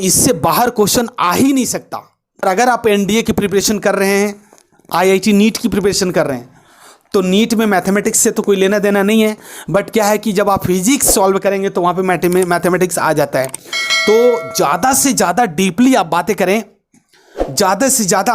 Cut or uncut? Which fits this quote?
cut